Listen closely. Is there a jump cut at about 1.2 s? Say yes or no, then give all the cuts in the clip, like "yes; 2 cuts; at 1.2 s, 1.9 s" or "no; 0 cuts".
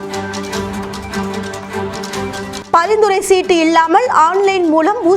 no; 1 cut; at 2.6 s